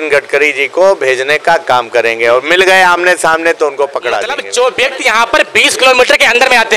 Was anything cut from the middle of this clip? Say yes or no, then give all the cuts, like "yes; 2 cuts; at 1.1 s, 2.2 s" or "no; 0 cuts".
yes; 1 cut; at 4.4 s